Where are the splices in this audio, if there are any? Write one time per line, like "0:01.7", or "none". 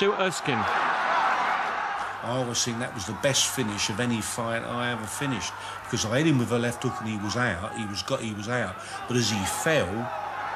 none